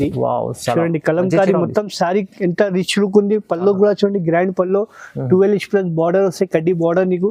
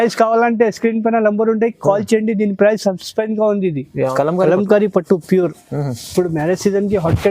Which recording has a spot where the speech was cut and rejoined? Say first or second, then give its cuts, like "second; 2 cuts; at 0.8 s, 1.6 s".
second; 1 cut; at 4.1 s